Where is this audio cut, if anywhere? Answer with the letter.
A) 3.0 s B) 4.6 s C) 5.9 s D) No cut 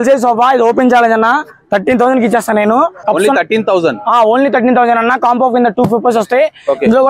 A